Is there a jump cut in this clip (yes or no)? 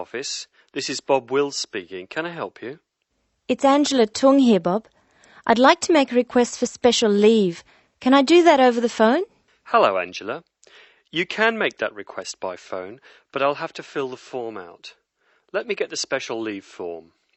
no